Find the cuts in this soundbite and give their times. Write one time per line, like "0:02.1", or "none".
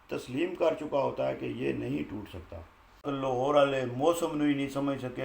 0:03.1